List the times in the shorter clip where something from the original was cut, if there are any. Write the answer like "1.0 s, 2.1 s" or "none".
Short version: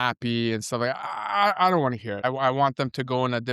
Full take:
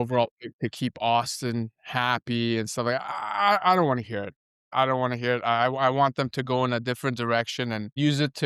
2.2 s